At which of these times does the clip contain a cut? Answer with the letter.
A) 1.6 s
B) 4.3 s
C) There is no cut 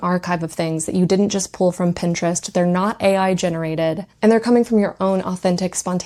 C